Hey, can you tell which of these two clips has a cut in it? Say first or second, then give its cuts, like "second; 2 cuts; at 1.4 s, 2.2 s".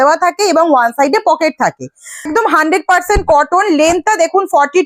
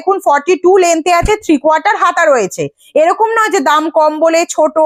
first; 1 cut; at 2.3 s